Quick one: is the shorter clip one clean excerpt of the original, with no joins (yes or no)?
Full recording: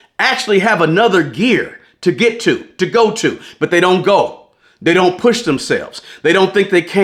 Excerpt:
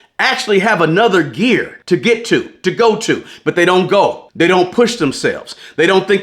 no